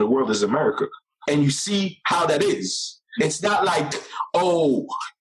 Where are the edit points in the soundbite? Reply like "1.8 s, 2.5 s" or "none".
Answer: 1.1 s, 3.1 s